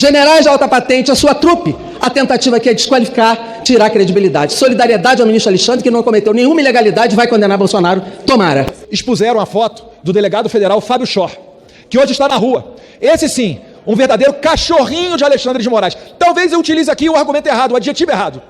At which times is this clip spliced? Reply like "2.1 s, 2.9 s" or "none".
8.8 s